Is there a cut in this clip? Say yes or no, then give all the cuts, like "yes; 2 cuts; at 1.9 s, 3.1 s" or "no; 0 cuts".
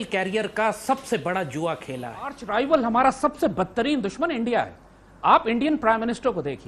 yes; 1 cut; at 2.4 s